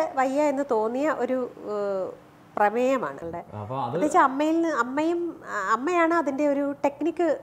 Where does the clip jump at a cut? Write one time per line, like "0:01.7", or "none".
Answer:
0:03.2